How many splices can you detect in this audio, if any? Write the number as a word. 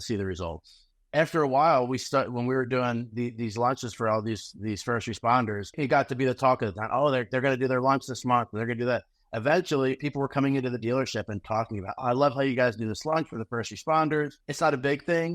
one